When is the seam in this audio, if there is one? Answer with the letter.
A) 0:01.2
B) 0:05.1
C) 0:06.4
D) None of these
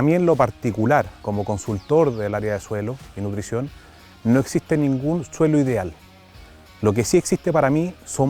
A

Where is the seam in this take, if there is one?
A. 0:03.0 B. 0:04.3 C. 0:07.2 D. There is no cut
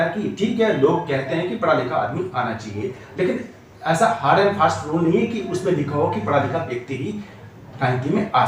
D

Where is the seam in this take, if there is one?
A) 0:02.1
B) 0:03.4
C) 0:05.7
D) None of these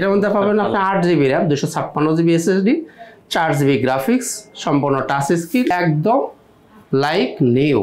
C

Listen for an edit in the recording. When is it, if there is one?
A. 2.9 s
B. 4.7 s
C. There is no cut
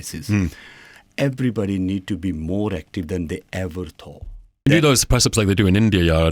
B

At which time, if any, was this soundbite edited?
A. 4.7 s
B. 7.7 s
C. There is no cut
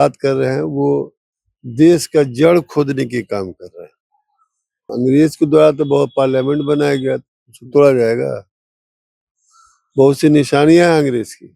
A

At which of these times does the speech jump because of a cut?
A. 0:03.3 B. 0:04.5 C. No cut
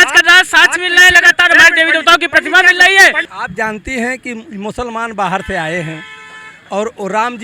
A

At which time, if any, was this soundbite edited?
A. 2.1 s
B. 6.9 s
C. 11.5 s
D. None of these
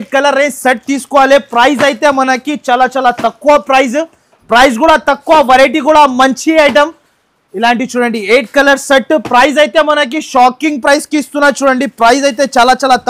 D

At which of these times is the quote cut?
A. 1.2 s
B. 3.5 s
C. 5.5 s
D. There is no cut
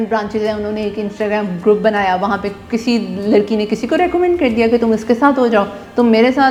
D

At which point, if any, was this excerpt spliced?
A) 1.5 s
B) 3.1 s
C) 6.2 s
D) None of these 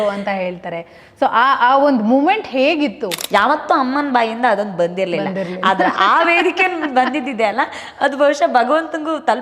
B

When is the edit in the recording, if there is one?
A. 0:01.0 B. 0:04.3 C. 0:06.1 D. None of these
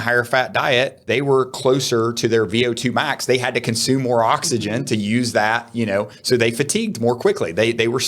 A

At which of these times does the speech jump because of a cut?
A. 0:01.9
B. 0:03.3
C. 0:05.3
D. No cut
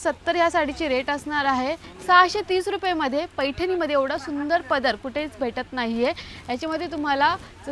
A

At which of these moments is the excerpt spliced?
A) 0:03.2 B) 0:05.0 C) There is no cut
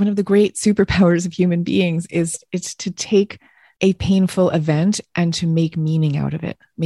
C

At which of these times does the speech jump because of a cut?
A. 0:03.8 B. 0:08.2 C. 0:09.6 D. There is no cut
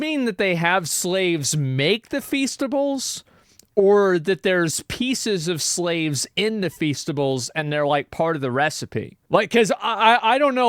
D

